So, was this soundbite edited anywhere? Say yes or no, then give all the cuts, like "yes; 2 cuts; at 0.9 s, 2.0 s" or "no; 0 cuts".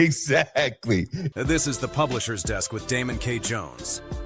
yes; 1 cut; at 1.2 s